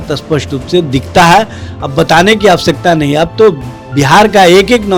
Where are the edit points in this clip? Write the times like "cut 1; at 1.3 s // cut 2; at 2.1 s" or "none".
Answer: none